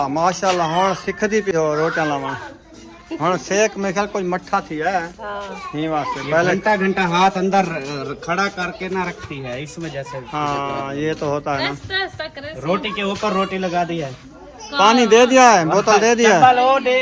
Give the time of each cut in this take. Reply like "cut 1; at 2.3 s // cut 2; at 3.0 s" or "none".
cut 1; at 1.5 s